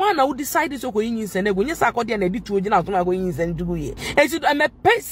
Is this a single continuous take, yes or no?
no